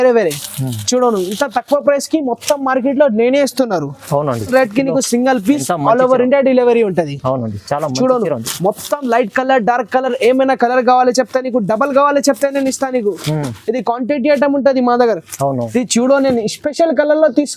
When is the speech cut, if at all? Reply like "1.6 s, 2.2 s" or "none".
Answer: 4.5 s, 15.6 s